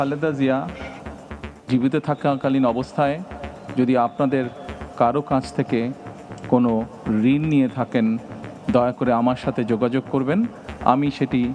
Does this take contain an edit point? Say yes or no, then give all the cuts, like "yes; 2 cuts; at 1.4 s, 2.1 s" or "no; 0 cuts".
no; 0 cuts